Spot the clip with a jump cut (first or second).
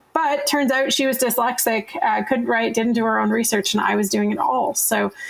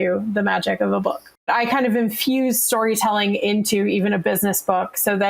second